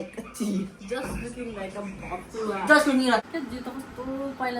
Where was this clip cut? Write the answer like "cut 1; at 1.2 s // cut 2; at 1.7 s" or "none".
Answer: cut 1; at 3.2 s